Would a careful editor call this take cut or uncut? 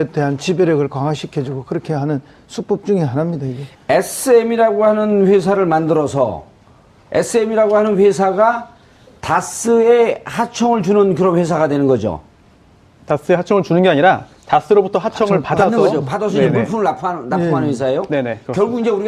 uncut